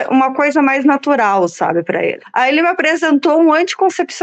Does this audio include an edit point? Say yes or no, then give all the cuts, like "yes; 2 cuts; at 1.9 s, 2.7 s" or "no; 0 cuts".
yes; 1 cut; at 2.2 s